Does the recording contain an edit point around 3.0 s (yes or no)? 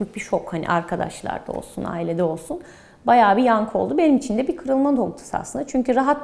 no